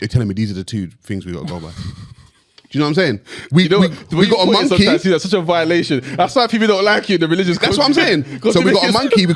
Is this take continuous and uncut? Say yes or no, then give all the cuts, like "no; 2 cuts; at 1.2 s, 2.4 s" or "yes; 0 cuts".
yes; 0 cuts